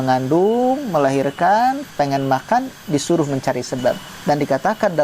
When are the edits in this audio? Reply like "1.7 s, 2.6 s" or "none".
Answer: 4.1 s